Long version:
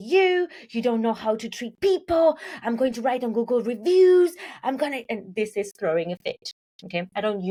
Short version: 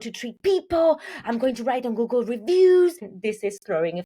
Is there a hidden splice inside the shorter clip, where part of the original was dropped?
yes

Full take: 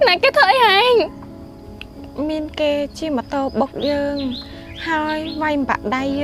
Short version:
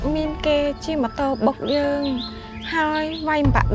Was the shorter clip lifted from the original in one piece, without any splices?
yes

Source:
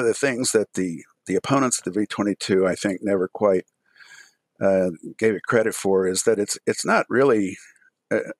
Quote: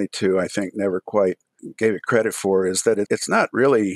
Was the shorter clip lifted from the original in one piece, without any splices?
no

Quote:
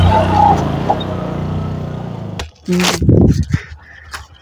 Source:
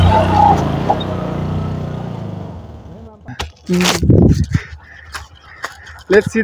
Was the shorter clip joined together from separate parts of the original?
yes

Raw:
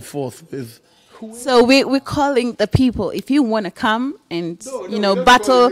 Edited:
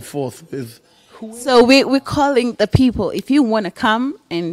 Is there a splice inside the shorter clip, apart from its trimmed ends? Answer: no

